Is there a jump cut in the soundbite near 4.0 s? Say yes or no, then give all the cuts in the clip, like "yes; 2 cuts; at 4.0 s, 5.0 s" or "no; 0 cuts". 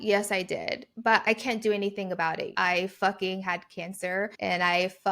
no; 1 cut; at 2.5 s